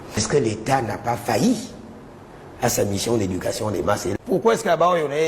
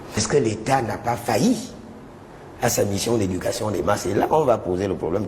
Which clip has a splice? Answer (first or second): first